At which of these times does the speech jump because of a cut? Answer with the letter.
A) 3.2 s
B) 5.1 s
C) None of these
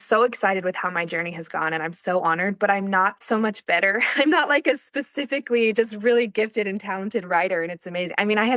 A